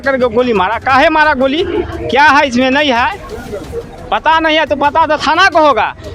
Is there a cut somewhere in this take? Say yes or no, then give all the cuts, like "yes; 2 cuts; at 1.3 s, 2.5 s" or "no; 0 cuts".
no; 0 cuts